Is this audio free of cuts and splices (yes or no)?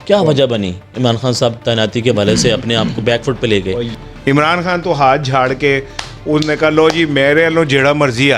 no